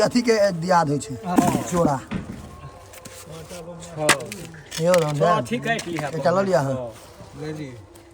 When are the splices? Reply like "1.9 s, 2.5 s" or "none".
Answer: 1.2 s